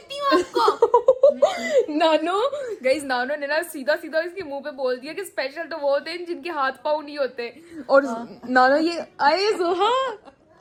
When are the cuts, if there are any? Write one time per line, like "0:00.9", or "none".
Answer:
none